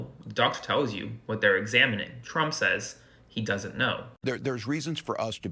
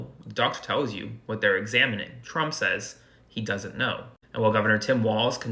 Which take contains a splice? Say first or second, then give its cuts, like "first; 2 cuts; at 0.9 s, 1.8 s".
first; 1 cut; at 4.2 s